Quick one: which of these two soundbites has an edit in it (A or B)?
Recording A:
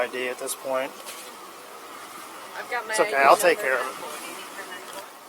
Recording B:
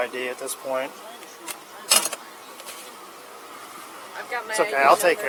A